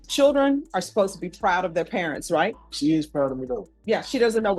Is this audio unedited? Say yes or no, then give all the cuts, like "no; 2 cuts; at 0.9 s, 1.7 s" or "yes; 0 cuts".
no; 2 cuts; at 2.6 s, 3.7 s